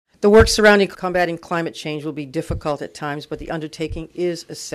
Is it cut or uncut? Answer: cut